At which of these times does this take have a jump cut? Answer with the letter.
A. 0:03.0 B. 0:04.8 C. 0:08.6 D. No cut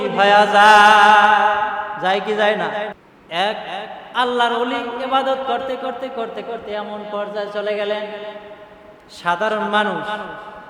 A